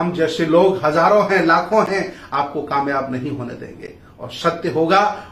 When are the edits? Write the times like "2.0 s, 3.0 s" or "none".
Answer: none